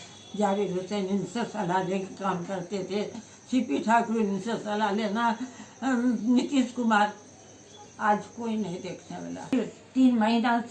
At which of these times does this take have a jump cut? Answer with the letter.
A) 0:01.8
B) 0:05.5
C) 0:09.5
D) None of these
C